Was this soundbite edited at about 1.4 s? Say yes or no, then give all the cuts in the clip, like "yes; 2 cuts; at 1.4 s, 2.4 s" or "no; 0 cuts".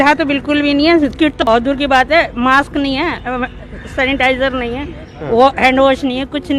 yes; 1 cut; at 1.4 s